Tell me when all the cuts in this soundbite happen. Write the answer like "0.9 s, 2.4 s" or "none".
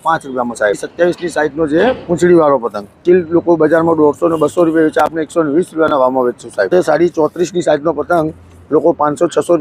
0.9 s, 3.0 s, 6.7 s